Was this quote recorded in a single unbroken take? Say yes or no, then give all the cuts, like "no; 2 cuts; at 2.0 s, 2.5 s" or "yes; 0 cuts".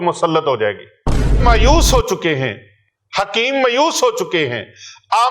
no; 1 cut; at 1.4 s